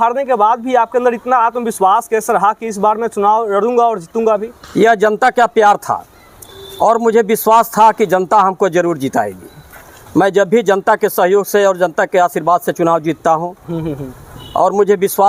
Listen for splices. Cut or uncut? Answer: uncut